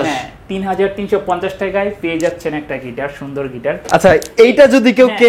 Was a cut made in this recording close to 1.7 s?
no; 1 cut; at 3.8 s

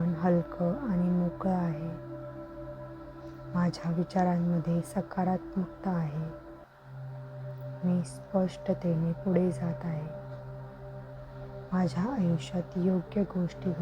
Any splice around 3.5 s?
yes; 2 cuts; at 1.8 s, 3.5 s

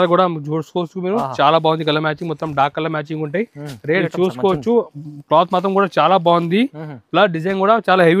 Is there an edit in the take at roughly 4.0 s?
yes; 1 cut; at 4.0 s

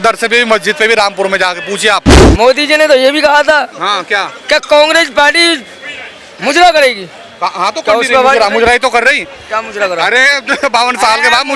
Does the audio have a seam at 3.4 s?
no; 1 cut; at 2.2 s

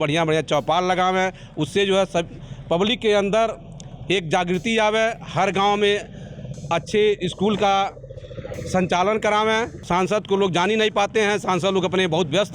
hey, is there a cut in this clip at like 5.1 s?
no; 1 cut; at 9.8 s

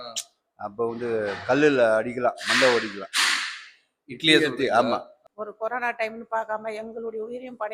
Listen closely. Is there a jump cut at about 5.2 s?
yes; 1 cut; at 5.2 s

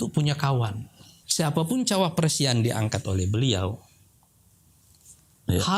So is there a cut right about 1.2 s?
yes; 1 cut; at 1.2 s

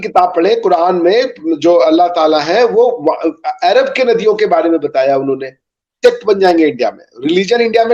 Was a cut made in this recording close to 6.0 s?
yes; 1 cut; at 6.0 s

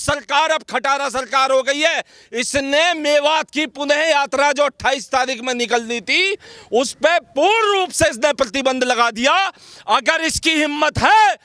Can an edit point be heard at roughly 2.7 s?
no; 0 cuts

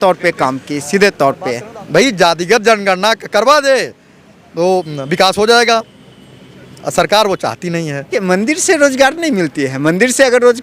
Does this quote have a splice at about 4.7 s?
no; 2 cuts; at 1.7 s, 8.2 s

